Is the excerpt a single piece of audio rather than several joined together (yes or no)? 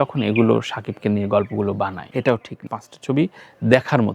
no